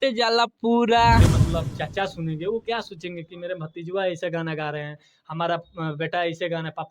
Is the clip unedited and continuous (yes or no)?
no